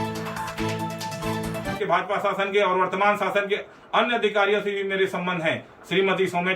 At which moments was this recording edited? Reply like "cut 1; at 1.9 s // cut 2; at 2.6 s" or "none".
cut 1; at 1.8 s